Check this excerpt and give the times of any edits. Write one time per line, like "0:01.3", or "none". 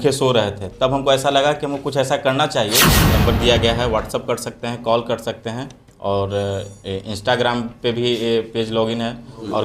0:02.9

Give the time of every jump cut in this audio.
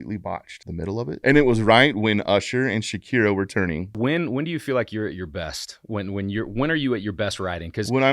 0:01.0
0:04.0

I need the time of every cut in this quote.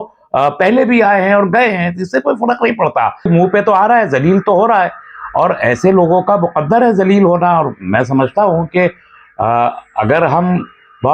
0:03.3

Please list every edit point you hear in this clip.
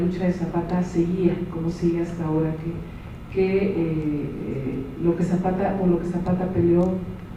none

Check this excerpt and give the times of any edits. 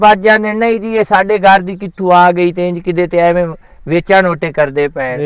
none

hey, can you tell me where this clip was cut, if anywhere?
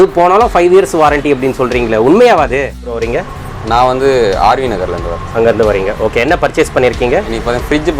0:03.0

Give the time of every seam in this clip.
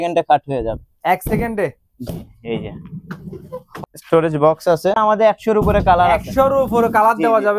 0:03.7
0:05.0

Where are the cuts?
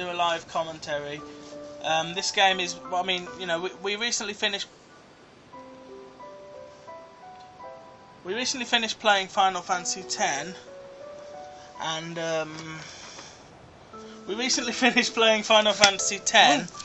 none

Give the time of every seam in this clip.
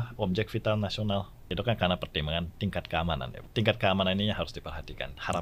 0:01.4
0:03.4

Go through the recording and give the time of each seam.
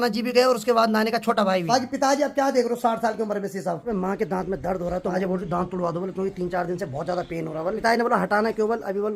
0:01.7
0:03.9
0:05.1
0:07.8

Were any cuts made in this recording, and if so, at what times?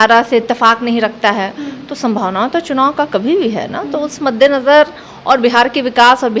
none

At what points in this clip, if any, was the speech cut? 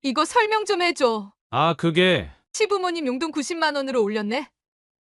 0:01.3

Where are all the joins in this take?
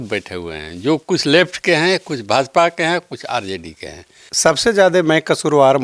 0:04.2

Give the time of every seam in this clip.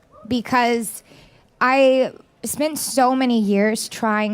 0:03.1

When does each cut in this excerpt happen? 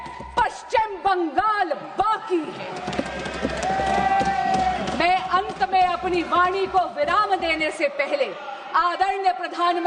none

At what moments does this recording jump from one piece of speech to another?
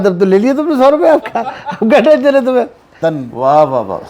0:02.9

